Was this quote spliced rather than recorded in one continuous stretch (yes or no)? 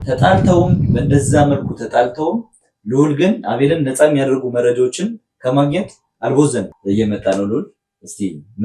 yes